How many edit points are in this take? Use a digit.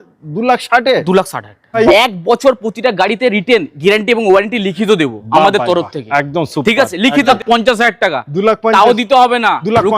2